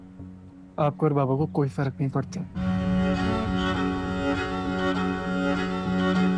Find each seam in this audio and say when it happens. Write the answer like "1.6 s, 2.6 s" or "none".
none

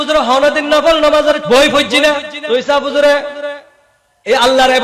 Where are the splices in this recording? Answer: 1.4 s, 2.3 s

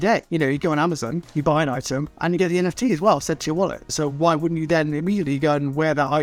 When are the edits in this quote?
none

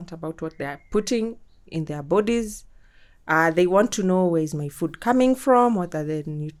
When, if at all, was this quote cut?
none

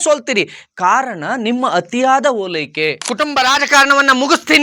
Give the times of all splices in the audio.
3.0 s

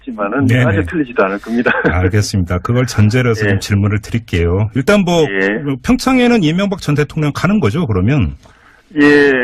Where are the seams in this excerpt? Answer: none

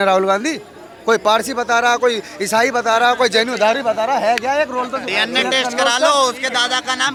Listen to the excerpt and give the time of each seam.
none

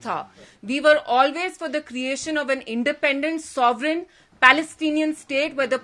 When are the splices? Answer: none

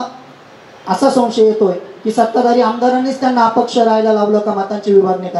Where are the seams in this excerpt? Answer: none

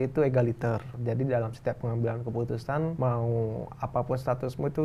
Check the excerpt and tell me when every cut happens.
1.0 s, 2.9 s

